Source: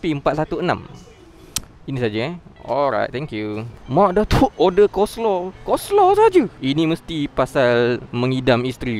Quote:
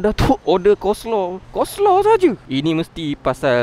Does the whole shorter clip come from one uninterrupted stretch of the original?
yes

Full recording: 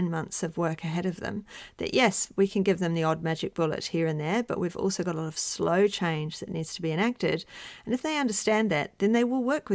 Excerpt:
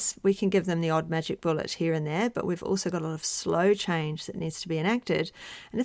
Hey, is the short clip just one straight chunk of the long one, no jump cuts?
yes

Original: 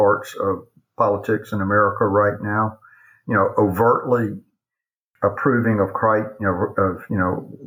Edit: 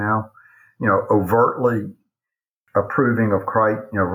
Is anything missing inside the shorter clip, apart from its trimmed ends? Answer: no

